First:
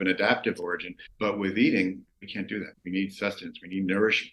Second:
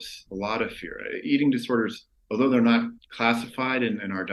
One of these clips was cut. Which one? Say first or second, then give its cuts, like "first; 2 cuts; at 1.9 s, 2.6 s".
first; 1 cut; at 2.7 s